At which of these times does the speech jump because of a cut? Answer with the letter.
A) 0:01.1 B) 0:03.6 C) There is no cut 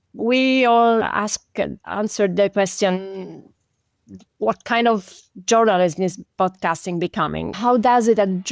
A